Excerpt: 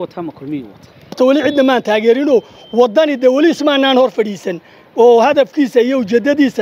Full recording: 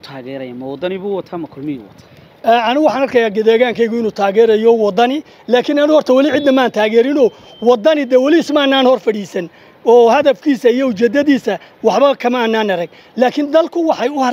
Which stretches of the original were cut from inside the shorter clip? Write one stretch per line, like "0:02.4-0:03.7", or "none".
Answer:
0:02.3-0:06.0